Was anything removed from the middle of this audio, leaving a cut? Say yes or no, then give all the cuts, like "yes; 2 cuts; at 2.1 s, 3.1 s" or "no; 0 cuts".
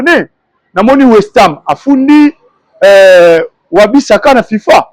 no; 0 cuts